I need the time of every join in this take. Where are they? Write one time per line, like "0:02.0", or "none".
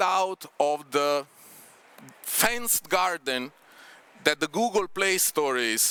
none